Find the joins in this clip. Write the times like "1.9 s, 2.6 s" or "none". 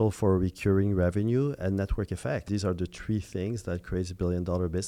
2.5 s